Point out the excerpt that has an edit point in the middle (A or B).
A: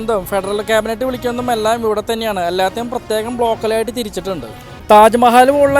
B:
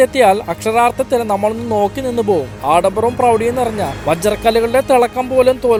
A